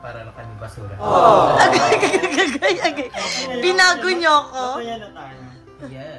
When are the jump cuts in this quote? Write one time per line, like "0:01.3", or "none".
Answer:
0:00.9
0:01.9